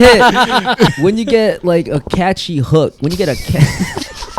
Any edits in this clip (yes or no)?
yes